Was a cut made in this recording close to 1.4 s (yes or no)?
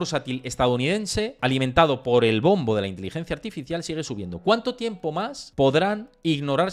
yes